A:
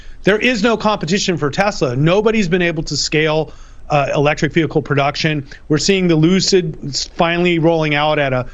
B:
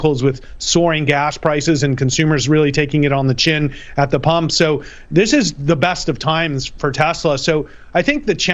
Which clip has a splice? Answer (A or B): A